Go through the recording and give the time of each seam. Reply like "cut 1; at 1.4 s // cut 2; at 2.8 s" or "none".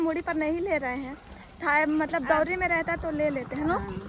none